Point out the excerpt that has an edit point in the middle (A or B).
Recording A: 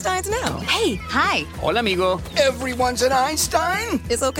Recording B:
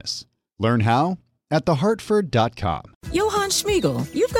B